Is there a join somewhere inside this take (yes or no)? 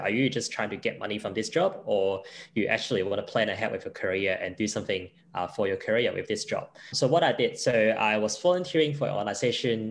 yes